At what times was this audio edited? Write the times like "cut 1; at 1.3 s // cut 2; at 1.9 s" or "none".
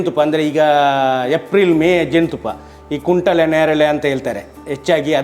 none